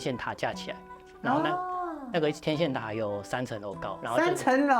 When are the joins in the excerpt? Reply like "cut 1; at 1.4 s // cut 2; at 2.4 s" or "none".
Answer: cut 1; at 3.9 s